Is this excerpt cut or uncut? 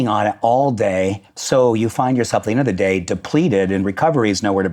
uncut